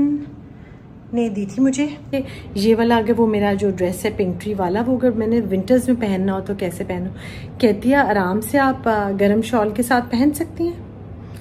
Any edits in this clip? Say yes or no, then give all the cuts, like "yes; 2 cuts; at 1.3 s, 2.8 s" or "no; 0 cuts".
yes; 1 cut; at 2.1 s